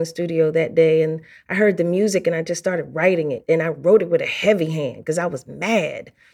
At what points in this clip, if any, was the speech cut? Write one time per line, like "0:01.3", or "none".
none